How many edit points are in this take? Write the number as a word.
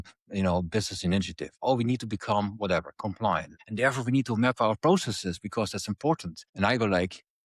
two